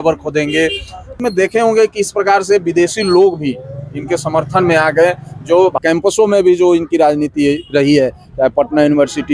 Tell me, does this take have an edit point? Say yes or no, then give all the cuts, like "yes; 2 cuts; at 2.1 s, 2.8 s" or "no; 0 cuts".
yes; 2 cuts; at 1.1 s, 5.8 s